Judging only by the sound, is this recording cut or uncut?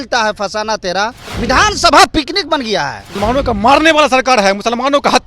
cut